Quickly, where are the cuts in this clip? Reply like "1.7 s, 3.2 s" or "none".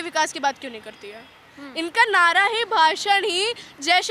none